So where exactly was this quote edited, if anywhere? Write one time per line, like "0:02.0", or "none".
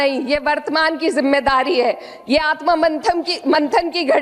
none